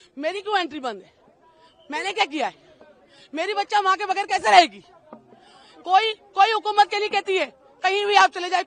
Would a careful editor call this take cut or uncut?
uncut